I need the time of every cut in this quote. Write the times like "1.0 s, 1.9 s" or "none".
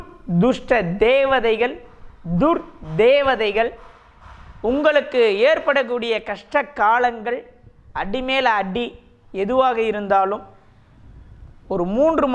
none